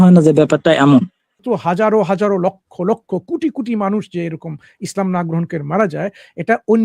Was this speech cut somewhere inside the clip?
yes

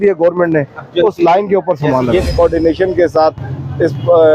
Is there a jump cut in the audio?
yes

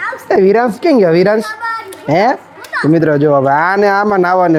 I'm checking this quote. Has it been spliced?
no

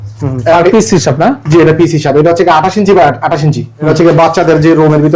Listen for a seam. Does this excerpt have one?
yes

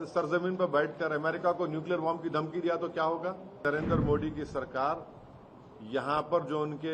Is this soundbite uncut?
no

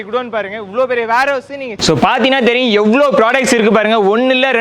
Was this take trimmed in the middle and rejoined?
yes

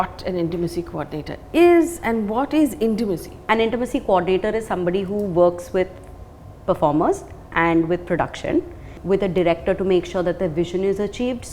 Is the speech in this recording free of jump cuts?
no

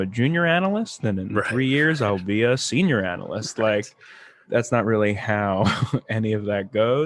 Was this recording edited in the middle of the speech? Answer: no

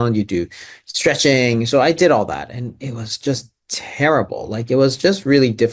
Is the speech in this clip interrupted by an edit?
no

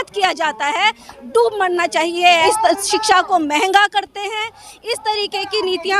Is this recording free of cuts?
no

